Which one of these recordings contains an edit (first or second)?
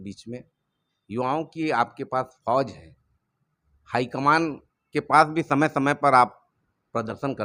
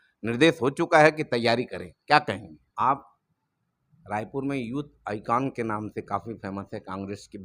second